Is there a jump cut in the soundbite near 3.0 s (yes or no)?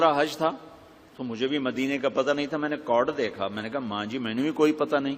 yes